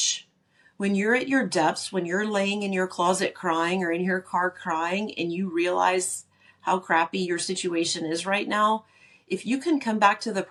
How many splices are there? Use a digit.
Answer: 0